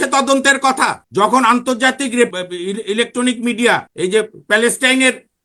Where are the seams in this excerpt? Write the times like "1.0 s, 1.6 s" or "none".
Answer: 1.0 s, 2.3 s, 3.9 s